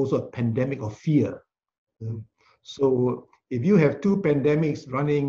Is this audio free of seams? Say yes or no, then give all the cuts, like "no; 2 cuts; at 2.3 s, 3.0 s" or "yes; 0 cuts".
yes; 0 cuts